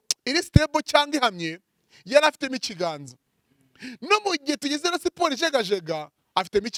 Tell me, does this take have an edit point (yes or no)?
no